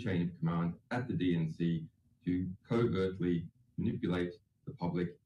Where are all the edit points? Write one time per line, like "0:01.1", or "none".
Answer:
0:01.4